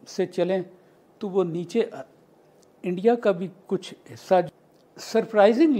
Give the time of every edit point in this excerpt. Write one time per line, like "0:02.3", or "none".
0:04.5